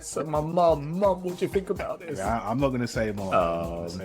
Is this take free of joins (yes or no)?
no